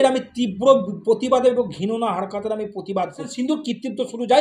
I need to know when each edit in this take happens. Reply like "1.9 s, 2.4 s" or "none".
3.3 s